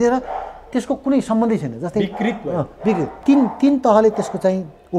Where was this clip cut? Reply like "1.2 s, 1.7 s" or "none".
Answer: 3.2 s

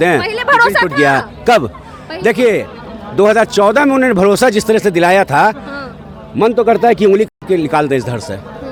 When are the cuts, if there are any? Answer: none

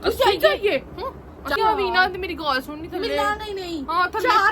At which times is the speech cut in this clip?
1.6 s

